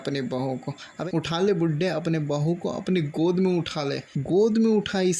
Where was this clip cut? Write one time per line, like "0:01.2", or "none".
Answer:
0:01.0
0:04.1